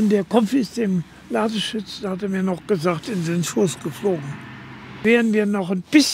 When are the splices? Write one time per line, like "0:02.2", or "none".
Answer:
0:05.0